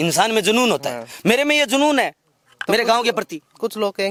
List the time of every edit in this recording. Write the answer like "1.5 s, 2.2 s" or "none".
none